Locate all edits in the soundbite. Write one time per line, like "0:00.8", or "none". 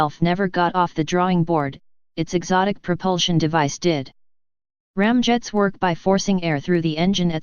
none